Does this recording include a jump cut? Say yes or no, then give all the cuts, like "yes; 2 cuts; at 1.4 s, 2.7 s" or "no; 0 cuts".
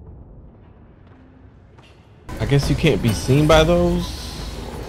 yes; 1 cut; at 2.3 s